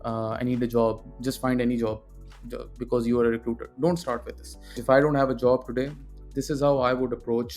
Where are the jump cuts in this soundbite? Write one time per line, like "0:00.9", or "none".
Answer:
0:04.8